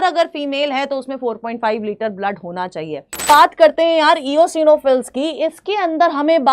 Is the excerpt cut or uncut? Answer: cut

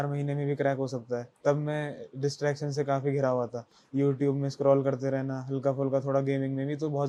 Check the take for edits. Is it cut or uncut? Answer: uncut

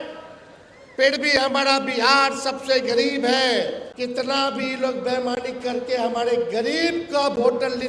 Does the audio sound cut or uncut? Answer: cut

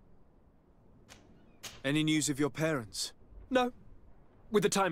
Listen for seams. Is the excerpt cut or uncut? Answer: cut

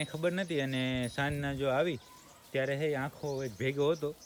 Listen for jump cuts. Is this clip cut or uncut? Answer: uncut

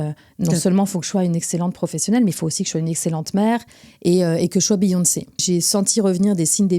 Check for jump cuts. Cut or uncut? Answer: cut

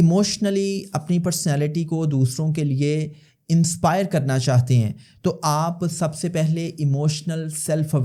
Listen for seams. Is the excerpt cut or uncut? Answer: uncut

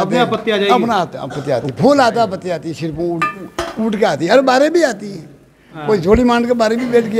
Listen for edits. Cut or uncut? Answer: uncut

